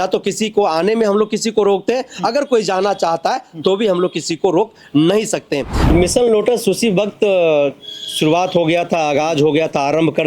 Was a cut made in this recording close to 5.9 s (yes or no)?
yes